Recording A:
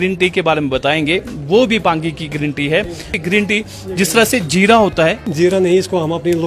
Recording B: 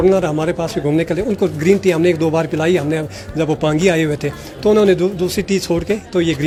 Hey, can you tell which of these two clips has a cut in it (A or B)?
A